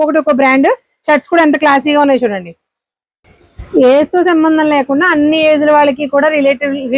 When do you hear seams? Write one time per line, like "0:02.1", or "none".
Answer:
none